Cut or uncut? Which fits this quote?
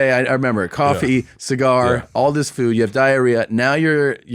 uncut